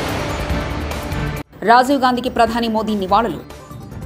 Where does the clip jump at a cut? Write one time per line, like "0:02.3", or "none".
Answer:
none